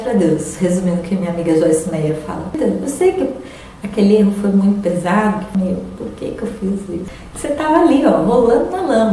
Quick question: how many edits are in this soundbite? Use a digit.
3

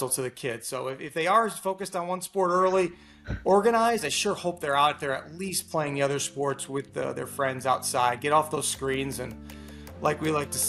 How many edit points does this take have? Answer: 0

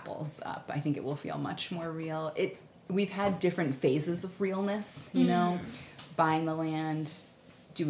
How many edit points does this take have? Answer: 0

